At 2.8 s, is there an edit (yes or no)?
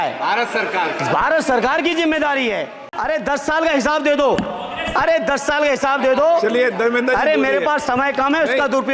yes